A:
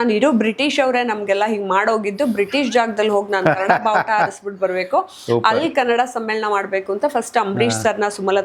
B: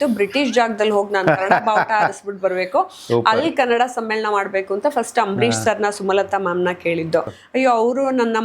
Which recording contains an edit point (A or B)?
B